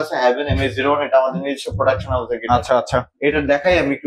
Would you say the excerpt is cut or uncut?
uncut